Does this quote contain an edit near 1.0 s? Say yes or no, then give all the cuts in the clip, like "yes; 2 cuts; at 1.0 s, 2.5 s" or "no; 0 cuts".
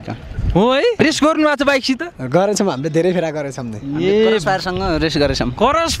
yes; 1 cut; at 1.0 s